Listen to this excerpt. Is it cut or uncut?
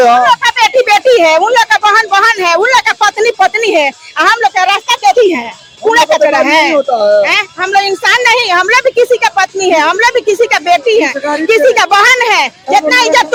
uncut